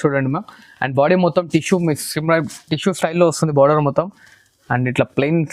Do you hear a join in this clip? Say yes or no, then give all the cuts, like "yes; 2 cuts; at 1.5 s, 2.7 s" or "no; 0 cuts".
no; 0 cuts